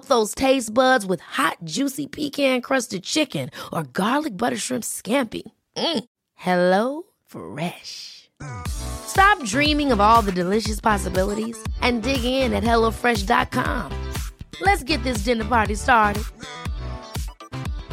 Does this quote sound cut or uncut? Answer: uncut